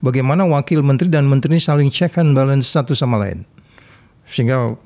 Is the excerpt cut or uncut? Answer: uncut